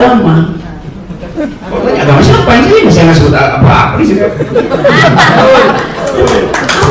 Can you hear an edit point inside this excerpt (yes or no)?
no